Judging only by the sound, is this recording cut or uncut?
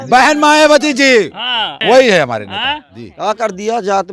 cut